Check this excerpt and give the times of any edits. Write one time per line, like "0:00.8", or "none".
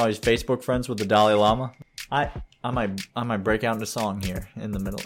0:01.8